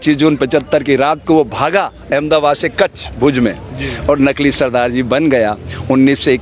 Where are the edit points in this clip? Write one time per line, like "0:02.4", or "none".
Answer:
none